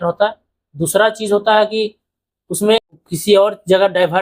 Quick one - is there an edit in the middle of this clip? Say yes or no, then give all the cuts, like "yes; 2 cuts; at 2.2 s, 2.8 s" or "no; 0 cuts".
yes; 1 cut; at 2.9 s